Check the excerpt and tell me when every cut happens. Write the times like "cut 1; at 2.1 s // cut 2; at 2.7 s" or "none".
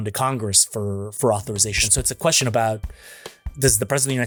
none